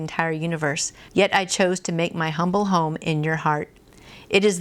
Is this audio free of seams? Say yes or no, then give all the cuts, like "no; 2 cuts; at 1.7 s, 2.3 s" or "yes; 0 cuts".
no; 1 cut; at 0.9 s